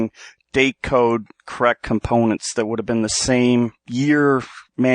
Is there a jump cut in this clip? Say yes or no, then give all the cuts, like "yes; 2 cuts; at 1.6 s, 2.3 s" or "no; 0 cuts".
yes; 1 cut; at 3.8 s